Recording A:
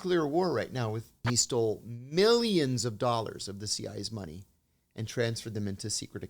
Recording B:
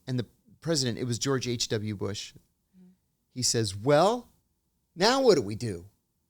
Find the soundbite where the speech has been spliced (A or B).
A